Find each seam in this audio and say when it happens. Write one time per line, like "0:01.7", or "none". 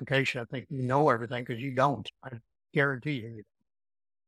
none